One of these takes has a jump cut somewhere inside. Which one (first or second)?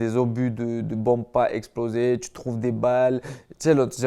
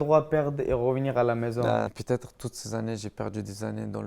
second